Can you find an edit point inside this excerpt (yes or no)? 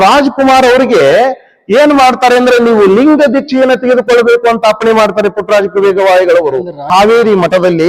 yes